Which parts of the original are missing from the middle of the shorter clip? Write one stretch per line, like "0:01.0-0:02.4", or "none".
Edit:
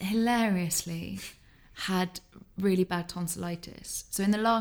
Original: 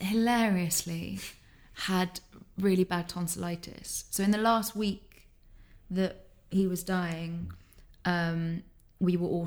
none